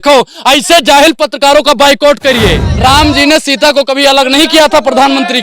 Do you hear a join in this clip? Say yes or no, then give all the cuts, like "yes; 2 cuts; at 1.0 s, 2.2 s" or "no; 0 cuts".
yes; 1 cut; at 2.7 s